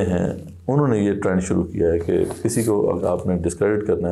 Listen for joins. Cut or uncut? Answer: uncut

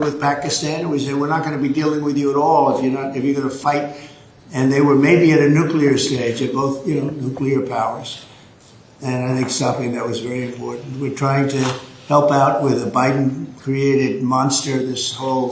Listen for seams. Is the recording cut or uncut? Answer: uncut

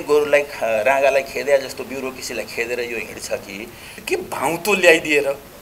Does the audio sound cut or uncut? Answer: cut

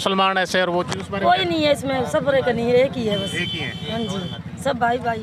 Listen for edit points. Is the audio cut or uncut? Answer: uncut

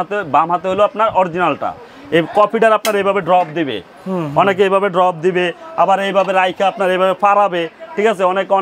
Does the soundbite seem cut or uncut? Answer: uncut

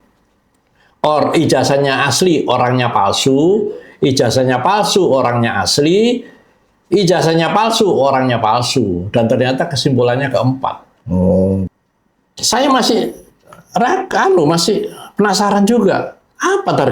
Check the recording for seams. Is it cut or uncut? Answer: cut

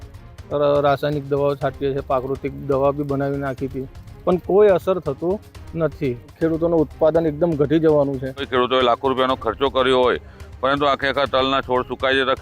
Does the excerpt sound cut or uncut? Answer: cut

